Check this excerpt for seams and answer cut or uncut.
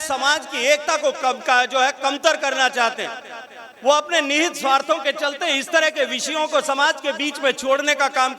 uncut